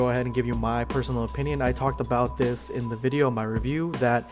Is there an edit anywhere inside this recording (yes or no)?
yes